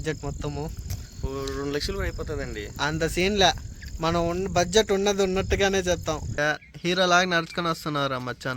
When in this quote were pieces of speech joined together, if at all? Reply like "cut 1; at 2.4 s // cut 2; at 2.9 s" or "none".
cut 1; at 6.3 s